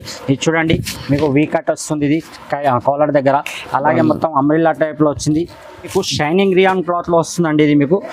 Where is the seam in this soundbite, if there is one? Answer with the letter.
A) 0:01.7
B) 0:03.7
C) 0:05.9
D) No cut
C